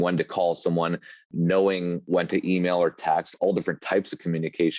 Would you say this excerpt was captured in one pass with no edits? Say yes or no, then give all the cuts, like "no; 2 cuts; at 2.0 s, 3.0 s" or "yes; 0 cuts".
no; 2 cuts; at 1.3 s, 2.0 s